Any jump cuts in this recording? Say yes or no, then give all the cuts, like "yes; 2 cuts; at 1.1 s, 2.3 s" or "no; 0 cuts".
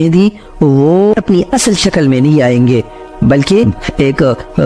no; 0 cuts